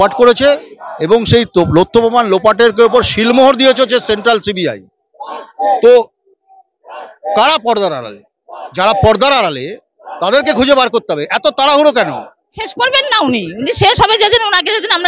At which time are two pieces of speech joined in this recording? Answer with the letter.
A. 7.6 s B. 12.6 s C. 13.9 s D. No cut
B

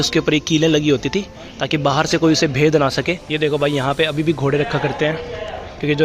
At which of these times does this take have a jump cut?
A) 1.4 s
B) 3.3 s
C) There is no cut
B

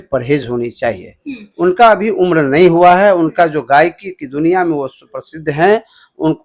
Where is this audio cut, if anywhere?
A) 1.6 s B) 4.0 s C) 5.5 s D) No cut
D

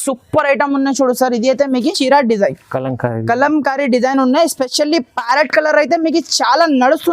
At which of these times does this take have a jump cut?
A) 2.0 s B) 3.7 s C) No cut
A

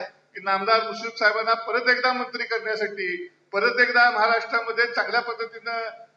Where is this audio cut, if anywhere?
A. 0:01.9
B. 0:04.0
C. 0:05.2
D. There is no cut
D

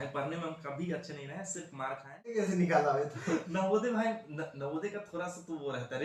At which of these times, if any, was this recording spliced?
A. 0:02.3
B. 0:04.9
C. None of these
A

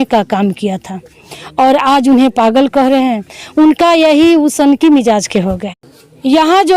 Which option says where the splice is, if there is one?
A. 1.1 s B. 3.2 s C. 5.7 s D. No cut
C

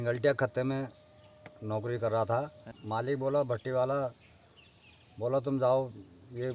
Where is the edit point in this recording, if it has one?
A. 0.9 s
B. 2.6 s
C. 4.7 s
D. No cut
B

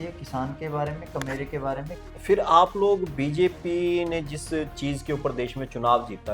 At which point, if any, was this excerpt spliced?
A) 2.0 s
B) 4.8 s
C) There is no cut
A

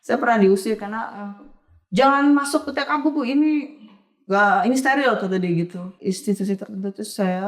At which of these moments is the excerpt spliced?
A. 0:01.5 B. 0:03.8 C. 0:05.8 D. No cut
C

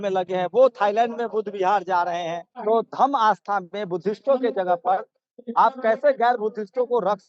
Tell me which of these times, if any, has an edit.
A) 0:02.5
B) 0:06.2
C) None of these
A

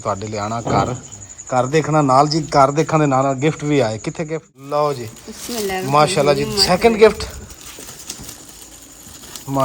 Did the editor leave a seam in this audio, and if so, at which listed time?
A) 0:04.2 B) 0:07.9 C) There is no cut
A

